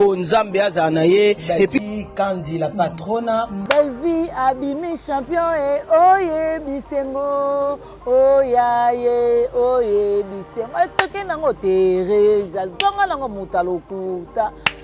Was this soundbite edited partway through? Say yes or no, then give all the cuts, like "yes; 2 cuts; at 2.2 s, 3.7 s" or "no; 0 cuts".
yes; 1 cut; at 3.6 s